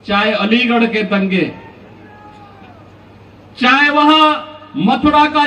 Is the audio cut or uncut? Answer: uncut